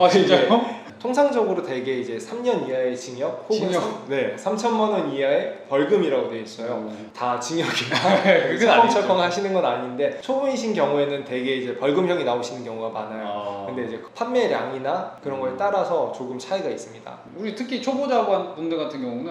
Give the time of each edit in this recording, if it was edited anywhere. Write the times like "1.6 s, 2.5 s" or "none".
none